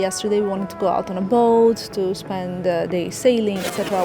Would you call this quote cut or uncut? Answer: uncut